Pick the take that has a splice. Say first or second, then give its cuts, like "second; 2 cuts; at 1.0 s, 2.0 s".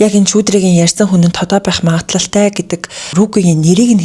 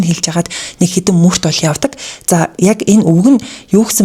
first; 1 cut; at 3.0 s